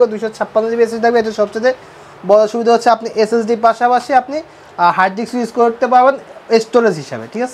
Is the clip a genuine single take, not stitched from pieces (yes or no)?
yes